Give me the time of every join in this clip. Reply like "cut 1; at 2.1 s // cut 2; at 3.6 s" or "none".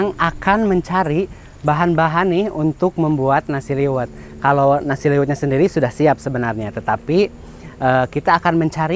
none